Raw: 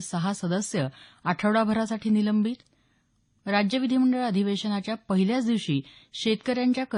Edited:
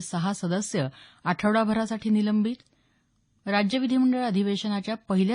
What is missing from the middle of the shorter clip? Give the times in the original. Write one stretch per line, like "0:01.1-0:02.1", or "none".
none